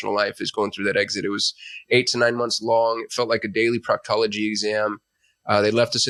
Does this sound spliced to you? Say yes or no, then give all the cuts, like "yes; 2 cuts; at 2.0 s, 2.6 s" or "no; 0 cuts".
no; 0 cuts